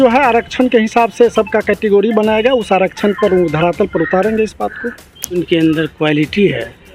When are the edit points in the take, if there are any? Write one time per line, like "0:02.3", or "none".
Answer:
0:05.4